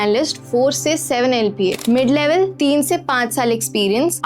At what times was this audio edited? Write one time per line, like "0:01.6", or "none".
0:01.8